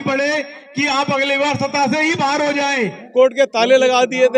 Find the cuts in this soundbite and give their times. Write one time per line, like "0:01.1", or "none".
0:03.0